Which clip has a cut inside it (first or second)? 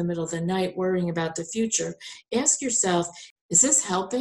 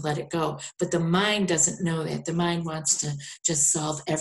first